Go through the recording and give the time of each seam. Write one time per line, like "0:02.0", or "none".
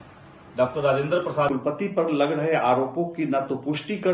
0:01.8